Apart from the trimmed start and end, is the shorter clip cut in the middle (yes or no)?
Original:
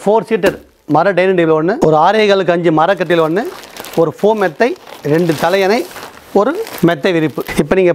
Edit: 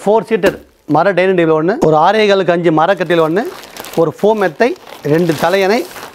no